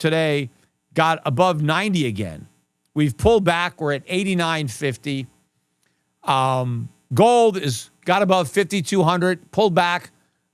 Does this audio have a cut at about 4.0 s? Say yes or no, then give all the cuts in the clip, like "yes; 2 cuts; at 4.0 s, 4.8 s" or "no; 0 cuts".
no; 0 cuts